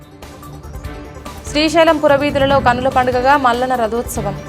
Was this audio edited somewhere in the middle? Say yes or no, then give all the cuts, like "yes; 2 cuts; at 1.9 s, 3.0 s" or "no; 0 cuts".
yes; 1 cut; at 1.2 s